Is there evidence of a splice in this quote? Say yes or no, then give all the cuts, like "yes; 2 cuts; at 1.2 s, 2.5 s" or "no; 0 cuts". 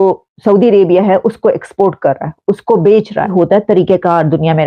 yes; 1 cut; at 3.3 s